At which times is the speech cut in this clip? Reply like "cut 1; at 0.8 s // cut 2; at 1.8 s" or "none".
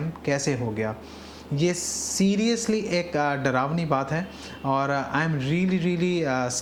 none